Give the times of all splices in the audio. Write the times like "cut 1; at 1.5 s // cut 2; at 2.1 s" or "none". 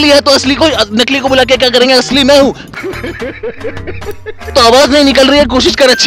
cut 1; at 2.6 s // cut 2; at 4.4 s